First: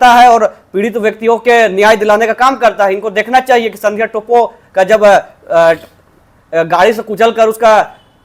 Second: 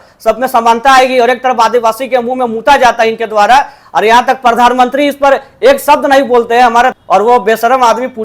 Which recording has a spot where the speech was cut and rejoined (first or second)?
second